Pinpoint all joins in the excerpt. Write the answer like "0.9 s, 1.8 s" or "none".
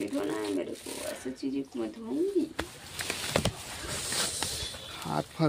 2.6 s